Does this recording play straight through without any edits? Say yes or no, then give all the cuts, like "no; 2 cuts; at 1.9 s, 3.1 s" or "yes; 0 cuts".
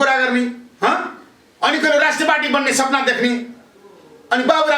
yes; 0 cuts